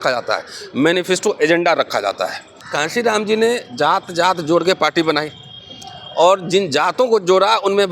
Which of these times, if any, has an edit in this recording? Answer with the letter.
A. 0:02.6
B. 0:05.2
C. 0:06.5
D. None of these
A